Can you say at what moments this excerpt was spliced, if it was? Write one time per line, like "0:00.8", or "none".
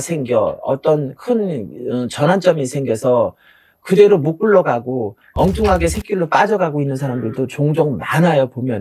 none